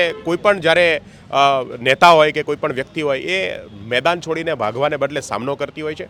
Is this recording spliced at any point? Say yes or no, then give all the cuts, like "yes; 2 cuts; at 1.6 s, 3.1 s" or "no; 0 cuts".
no; 0 cuts